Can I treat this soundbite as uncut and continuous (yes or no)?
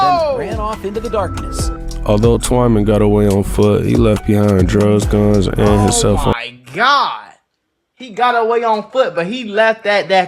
yes